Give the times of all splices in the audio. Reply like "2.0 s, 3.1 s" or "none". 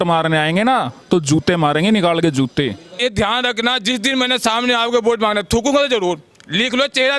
3.0 s